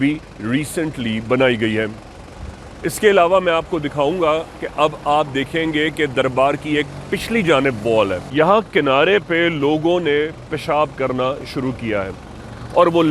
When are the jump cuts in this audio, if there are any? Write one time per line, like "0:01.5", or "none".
0:08.2